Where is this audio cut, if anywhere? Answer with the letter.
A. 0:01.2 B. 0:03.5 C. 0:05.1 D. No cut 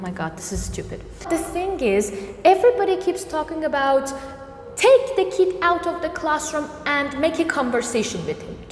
A